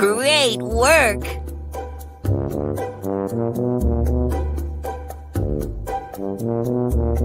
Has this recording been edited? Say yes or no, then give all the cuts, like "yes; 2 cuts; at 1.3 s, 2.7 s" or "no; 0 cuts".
no; 0 cuts